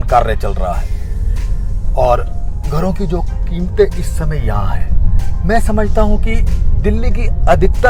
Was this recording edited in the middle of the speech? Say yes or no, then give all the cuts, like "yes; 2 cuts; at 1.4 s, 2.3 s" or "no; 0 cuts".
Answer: no; 0 cuts